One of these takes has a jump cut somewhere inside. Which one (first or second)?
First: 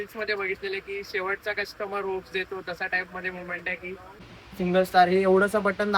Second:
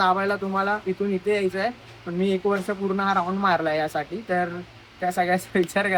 first